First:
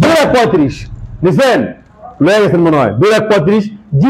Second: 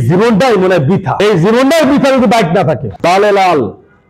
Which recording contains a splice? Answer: second; 2 cuts; at 1.1 s, 3.0 s

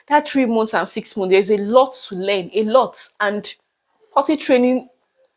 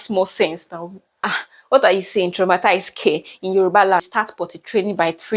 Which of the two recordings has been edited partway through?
second; 2 cuts; at 1.3 s, 4.1 s

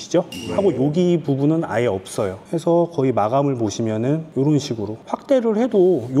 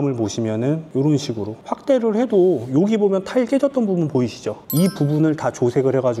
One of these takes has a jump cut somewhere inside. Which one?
first; 1 cut; at 2.4 s

